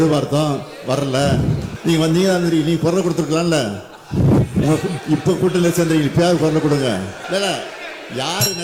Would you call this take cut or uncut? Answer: cut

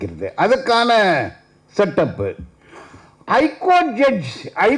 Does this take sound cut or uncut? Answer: uncut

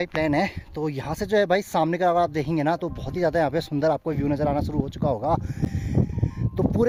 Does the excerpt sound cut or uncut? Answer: uncut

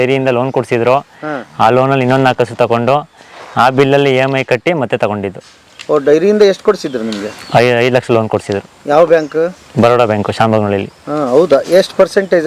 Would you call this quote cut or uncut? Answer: uncut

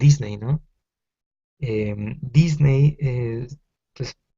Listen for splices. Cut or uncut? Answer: cut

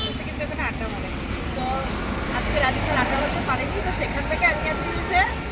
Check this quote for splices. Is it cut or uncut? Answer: uncut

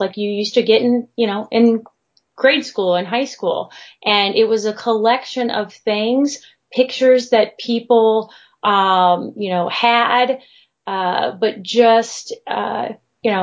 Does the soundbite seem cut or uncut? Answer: uncut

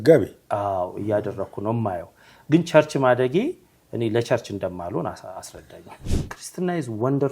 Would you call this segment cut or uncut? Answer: cut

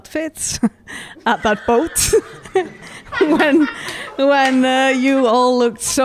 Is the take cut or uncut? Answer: uncut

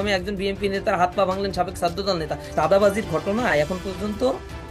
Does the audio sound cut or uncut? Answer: cut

